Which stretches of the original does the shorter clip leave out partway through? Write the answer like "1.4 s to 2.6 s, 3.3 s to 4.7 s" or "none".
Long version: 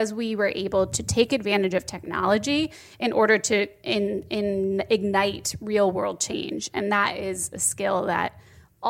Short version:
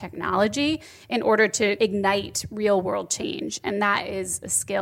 3.7 s to 4.9 s